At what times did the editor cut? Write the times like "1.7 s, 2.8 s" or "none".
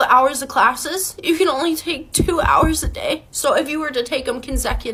none